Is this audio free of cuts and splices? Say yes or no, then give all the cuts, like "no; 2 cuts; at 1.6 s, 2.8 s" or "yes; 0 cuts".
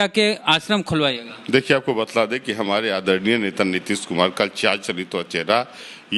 yes; 0 cuts